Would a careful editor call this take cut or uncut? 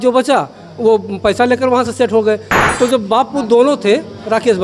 cut